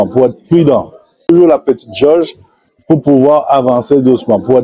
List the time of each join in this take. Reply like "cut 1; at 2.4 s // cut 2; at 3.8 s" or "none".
cut 1; at 1.3 s